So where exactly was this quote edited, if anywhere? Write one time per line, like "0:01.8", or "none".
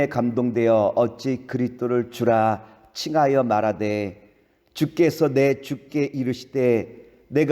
0:04.4